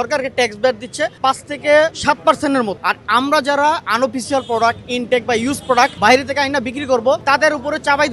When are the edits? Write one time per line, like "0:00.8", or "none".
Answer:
0:01.1
0:02.0
0:02.8
0:05.9
0:07.2